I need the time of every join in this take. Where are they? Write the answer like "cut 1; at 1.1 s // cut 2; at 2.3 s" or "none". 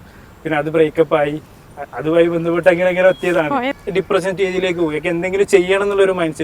cut 1; at 3.7 s